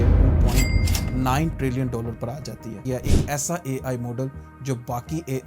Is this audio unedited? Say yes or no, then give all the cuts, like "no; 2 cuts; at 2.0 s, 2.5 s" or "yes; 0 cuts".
no; 1 cut; at 2.8 s